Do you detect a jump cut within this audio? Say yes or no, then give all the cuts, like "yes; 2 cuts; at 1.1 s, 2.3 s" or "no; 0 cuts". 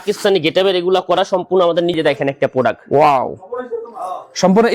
yes; 1 cut; at 1.9 s